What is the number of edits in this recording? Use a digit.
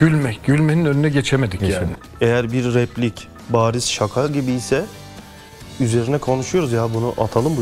1